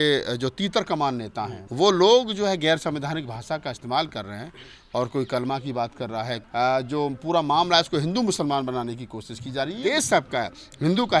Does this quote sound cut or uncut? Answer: cut